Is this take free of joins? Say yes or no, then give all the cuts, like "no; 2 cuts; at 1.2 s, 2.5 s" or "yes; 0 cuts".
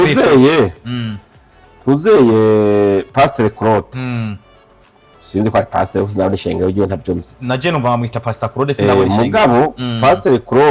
yes; 0 cuts